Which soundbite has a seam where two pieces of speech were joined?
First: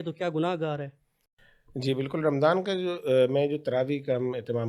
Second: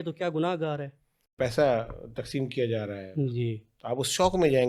second; 1 cut; at 1.4 s

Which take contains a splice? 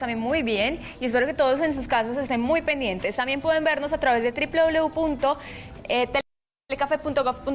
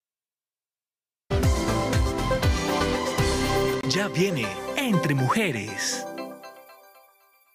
first; 1 cut; at 4.4 s

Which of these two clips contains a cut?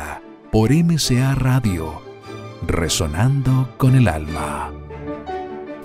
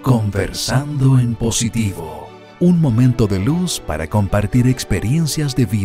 first; 1 cut; at 4.9 s

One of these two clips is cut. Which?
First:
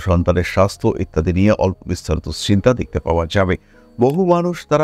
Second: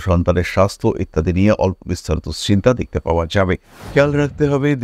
second; 1 cut; at 3.8 s

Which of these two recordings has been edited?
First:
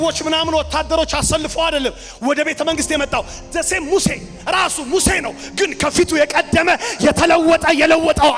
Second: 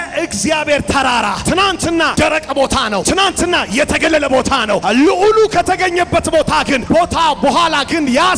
second; 4 cuts; at 1.8 s, 3.0 s, 4.8 s, 6.8 s

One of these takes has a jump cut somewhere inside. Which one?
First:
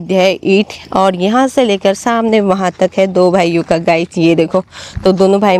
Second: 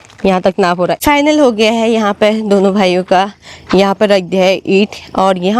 second; 1 cut; at 1.0 s

